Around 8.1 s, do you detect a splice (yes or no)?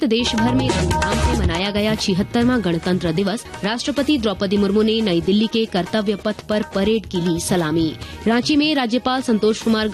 yes